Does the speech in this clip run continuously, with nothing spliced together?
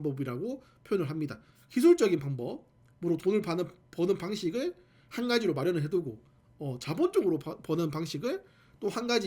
no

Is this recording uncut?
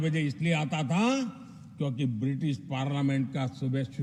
yes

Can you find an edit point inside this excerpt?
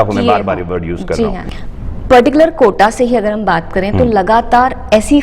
yes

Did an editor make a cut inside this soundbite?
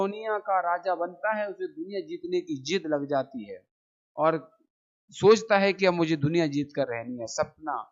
no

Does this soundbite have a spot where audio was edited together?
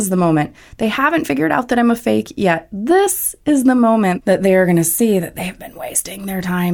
yes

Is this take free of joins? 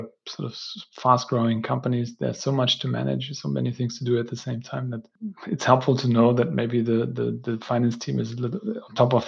no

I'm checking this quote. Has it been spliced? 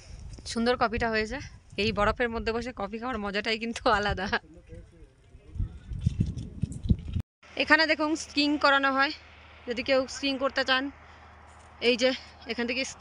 yes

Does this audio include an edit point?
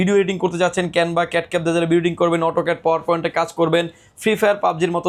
no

